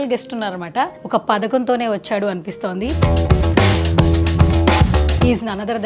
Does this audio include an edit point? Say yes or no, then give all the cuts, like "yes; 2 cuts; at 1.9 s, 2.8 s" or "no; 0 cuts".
yes; 1 cut; at 0.9 s